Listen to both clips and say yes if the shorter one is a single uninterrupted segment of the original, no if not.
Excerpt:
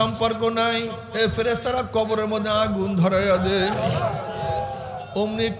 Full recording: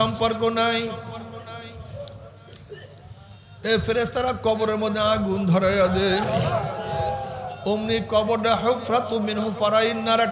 no